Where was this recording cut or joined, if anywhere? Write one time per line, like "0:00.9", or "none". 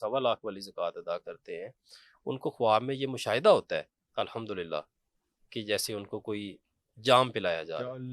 none